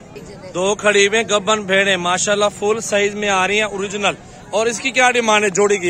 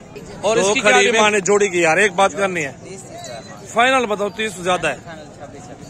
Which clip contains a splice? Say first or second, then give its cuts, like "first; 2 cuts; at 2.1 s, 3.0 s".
second; 1 cut; at 1.1 s